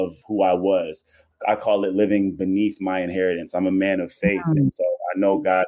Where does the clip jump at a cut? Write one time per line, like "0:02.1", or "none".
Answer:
none